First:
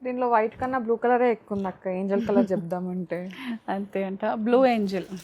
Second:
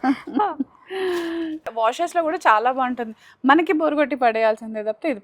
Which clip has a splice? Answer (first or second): second